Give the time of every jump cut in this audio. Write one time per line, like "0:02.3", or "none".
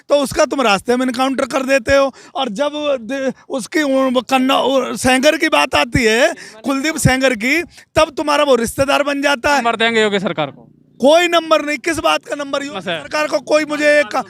0:09.6